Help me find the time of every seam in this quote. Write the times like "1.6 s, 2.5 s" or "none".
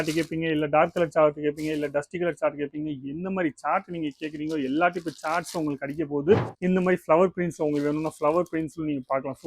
6.5 s